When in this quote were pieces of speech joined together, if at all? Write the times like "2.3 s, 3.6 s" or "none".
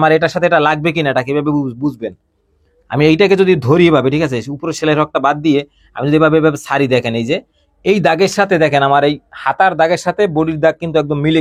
none